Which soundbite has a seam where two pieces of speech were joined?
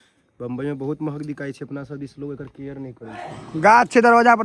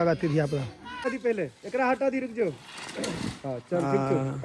second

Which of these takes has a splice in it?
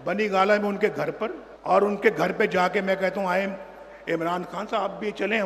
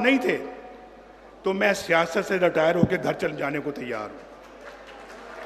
first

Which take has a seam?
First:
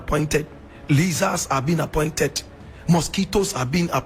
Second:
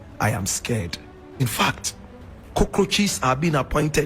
second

